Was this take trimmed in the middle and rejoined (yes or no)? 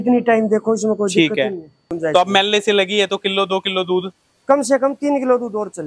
yes